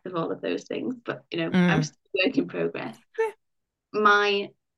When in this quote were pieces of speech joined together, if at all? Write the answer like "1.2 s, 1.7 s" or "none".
none